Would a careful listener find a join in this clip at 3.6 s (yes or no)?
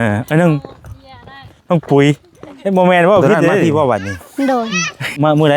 yes